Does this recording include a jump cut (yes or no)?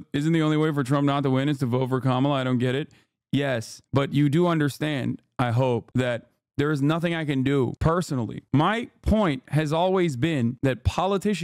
yes